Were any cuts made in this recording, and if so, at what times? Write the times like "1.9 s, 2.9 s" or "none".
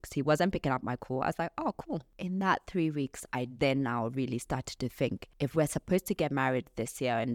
2.1 s, 5.2 s